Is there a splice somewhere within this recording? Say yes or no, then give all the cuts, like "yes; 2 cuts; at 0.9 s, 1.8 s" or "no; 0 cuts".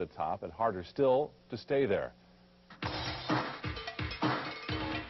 no; 0 cuts